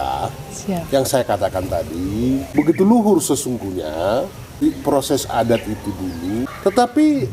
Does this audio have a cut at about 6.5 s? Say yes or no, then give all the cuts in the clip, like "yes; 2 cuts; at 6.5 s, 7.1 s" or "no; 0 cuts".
yes; 3 cuts; at 2.5 s, 4.5 s, 6.5 s